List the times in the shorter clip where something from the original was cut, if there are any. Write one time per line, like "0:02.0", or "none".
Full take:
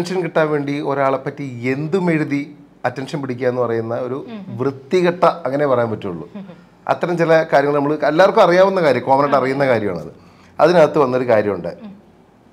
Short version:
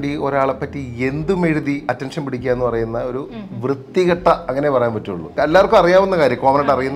0:01.8
0:05.3